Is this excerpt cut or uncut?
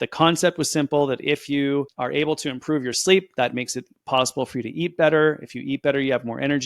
uncut